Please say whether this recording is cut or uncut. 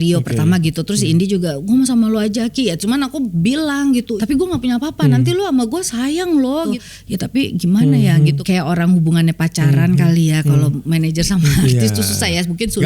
cut